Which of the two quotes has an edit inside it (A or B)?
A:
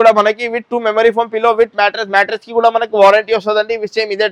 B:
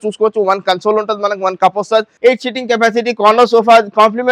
B